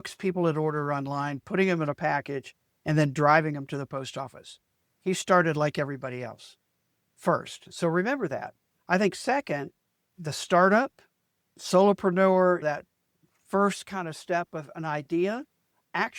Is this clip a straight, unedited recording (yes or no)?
yes